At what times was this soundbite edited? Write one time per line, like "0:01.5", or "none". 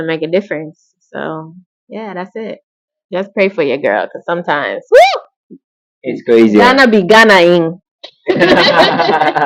none

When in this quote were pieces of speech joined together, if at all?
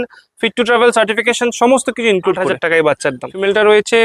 0:02.8

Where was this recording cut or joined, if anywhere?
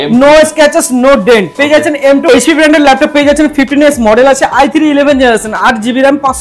0:02.3

